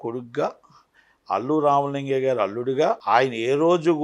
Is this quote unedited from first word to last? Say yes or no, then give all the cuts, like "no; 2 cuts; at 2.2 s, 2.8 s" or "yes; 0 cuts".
no; 1 cut; at 3.0 s